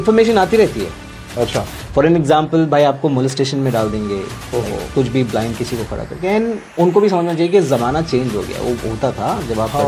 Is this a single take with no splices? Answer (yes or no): yes